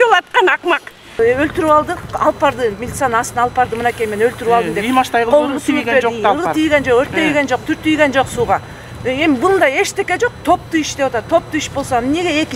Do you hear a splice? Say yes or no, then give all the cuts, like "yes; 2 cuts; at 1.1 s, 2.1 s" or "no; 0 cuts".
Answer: yes; 1 cut; at 1.2 s